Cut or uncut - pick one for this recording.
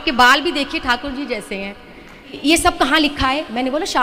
cut